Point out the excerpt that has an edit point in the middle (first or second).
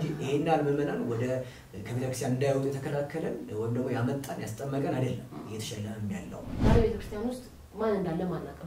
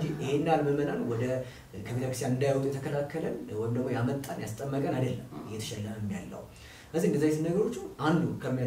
first